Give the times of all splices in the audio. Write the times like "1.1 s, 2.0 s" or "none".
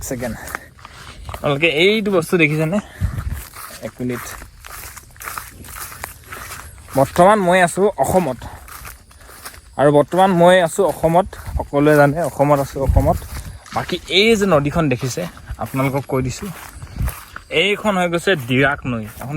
none